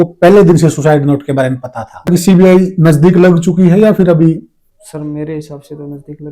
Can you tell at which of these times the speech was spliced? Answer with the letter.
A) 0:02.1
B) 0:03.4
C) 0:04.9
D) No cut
A